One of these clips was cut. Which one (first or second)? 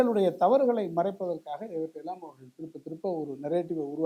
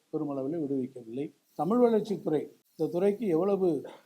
second